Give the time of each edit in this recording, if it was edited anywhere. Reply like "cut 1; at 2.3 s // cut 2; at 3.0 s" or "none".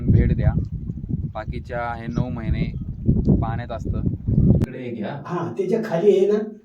cut 1; at 4.7 s